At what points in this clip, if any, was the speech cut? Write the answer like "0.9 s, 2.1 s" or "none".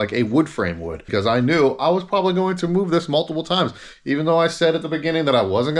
1.0 s